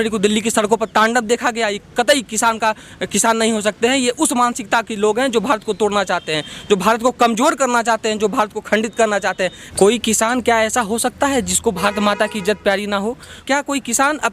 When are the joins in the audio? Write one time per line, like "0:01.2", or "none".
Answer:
0:09.6
0:13.4

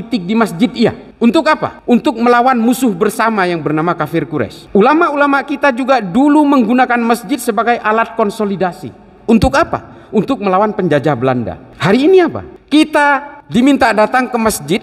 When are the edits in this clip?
0:11.7

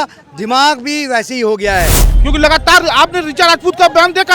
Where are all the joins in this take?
0:02.0

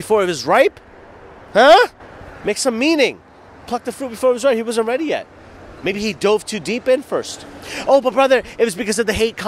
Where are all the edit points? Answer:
none

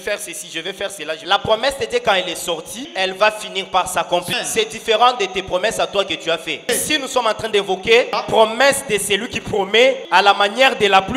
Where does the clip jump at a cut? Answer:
0:01.2
0:02.9
0:04.3
0:06.6
0:08.2
0:10.0

